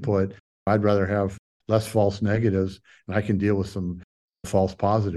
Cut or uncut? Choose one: uncut